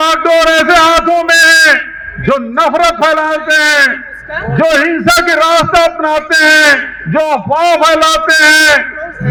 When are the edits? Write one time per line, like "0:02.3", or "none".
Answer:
none